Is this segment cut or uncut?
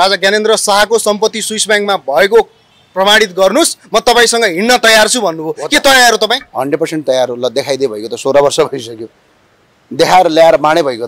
uncut